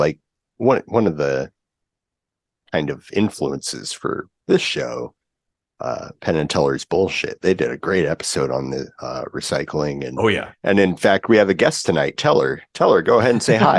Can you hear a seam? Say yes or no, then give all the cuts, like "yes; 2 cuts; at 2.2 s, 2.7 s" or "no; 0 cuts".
no; 0 cuts